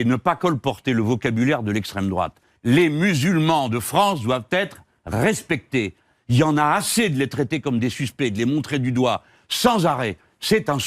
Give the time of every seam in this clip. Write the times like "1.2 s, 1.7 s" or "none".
2.4 s